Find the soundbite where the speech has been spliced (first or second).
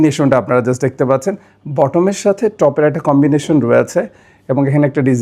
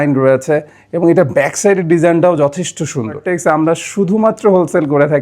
second